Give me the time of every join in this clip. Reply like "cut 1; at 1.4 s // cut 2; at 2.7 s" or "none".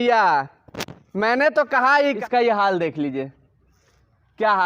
cut 1; at 2.2 s